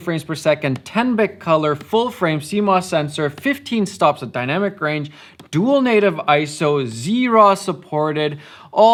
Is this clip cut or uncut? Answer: uncut